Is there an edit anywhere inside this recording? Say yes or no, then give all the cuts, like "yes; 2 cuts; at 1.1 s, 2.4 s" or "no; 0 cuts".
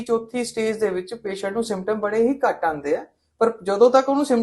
no; 0 cuts